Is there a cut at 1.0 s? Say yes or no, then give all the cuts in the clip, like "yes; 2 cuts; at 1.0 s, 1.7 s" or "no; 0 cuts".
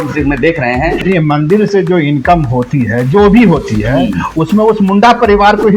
yes; 1 cut; at 1.0 s